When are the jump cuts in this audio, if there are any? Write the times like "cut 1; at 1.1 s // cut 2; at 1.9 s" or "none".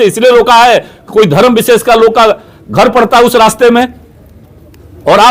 none